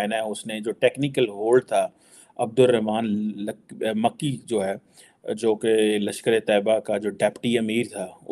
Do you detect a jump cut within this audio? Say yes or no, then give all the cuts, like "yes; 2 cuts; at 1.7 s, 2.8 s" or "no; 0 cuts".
no; 0 cuts